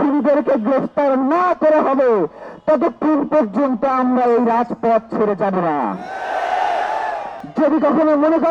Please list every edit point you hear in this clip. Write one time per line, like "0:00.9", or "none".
0:07.4